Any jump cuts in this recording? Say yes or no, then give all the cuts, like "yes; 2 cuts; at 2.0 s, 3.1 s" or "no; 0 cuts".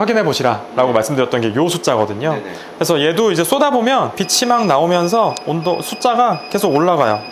no; 0 cuts